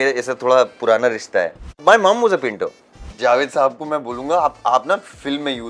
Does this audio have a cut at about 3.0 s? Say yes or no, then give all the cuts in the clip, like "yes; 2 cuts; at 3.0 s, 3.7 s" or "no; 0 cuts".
yes; 2 cuts; at 1.7 s, 3.0 s